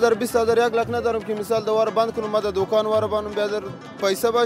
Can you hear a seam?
no; 0 cuts

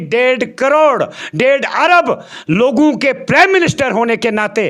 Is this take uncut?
yes; 0 cuts

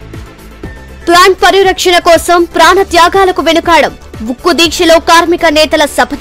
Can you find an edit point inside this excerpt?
yes; 1 cut; at 1.0 s

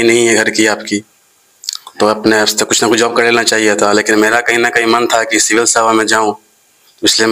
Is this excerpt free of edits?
yes; 0 cuts

